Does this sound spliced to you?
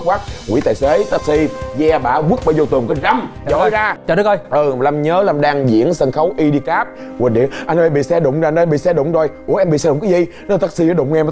yes; 1 cut; at 4.0 s

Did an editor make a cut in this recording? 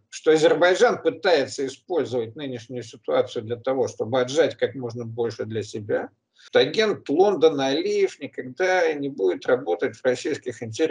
yes; 1 cut; at 6.5 s

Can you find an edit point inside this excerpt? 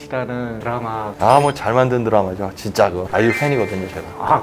yes; 1 cut; at 1.1 s

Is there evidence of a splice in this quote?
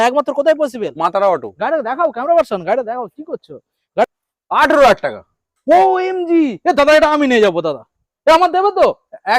yes; 1 cut; at 4.0 s

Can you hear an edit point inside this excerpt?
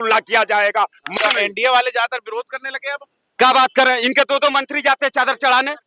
yes; 1 cut; at 1.1 s

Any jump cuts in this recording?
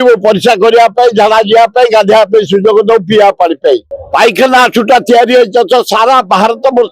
yes; 1 cut; at 3.9 s

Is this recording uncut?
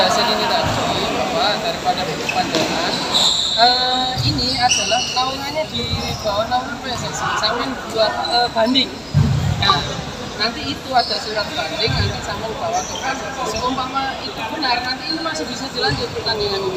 yes; 0 cuts

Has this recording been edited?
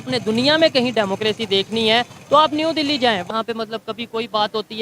yes; 1 cut; at 3.2 s

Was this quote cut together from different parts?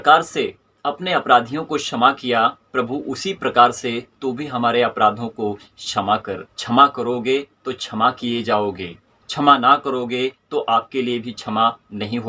no; 0 cuts

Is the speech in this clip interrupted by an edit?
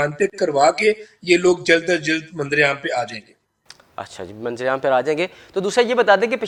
no; 0 cuts

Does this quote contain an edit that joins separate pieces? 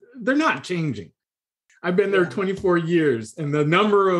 yes; 1 cut; at 1.4 s

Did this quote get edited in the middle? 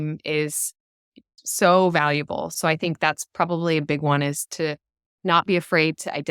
yes; 2 cuts; at 1.3 s, 2.5 s

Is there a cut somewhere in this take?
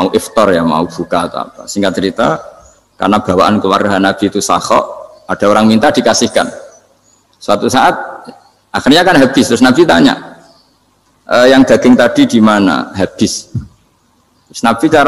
no; 0 cuts

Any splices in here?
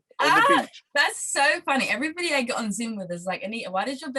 no; 0 cuts

